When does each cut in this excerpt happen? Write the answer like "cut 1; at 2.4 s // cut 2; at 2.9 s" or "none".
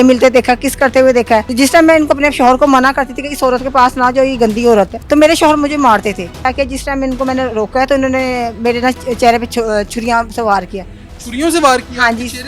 cut 1; at 1.5 s // cut 2; at 5.0 s // cut 3; at 6.4 s